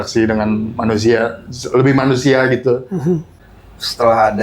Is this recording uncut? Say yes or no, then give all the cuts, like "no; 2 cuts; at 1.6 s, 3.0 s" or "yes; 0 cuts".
no; 1 cut; at 3.3 s